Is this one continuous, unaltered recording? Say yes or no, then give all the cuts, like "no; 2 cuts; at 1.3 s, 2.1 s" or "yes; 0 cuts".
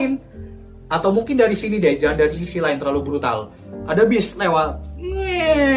yes; 0 cuts